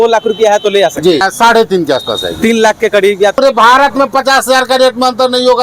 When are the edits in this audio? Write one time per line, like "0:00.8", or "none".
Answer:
0:01.3
0:03.4

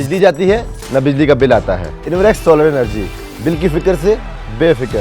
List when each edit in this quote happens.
0:01.9

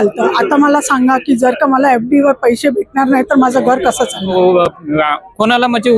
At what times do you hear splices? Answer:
0:04.3

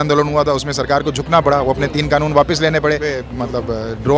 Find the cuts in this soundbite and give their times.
0:03.3

